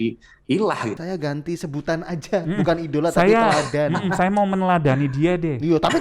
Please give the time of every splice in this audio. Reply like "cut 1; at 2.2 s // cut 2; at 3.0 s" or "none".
cut 1; at 1.0 s